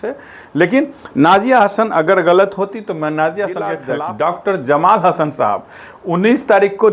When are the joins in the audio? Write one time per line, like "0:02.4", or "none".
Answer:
0:03.8